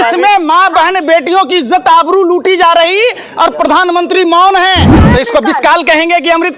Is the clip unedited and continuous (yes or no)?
no